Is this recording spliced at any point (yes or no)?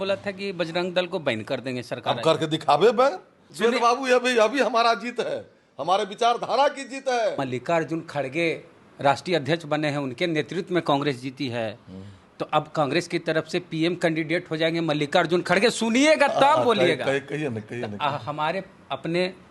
yes